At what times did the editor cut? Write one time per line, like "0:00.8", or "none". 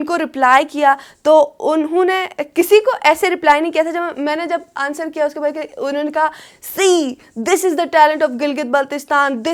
none

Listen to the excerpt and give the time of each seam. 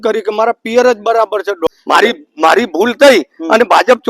0:01.7

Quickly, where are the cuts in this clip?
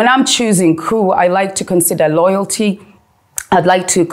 none

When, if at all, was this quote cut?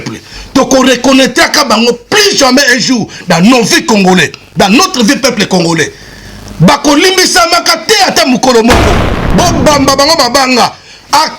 0:09.2

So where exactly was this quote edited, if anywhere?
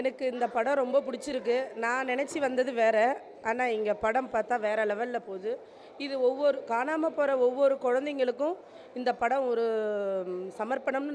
none

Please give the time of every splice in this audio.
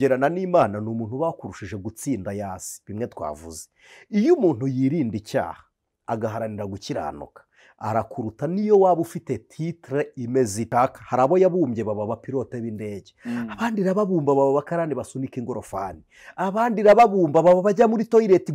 0:10.6

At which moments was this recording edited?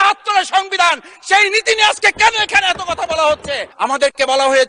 0:03.6

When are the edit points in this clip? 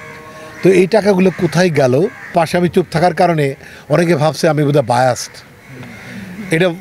0:02.3

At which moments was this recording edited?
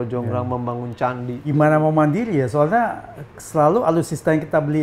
0:01.4

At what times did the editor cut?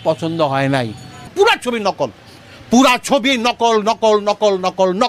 0:01.3

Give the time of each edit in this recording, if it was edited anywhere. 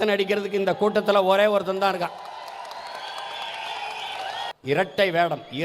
0:04.5

